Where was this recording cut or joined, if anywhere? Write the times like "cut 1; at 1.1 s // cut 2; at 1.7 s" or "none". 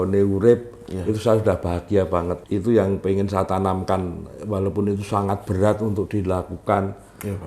cut 1; at 2.4 s